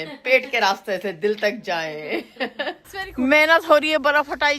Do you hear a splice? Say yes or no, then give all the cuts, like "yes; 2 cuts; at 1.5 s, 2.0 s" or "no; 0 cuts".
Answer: yes; 1 cut; at 2.9 s